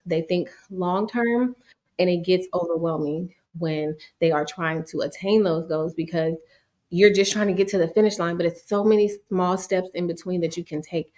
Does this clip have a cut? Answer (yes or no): no